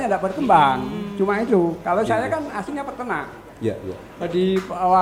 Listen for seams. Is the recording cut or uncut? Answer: uncut